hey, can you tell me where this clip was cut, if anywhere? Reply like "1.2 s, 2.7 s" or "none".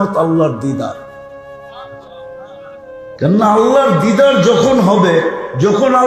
none

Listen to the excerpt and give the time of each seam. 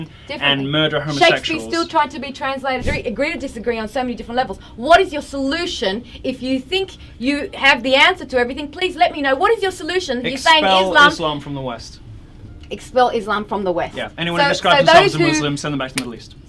2.9 s

